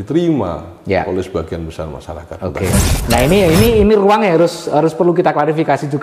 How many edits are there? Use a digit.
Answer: 1